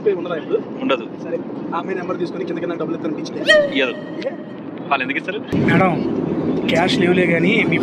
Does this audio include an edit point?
yes; 1 cut; at 5.5 s

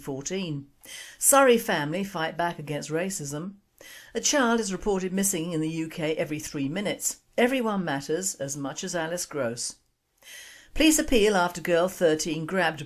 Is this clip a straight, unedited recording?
no; 1 cut; at 5.6 s

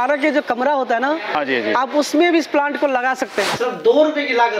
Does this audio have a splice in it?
yes; 1 cut; at 3.5 s

